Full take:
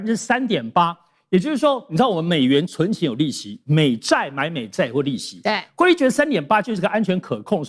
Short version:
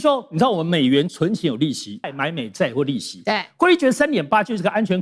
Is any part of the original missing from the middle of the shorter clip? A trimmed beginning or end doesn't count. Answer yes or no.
yes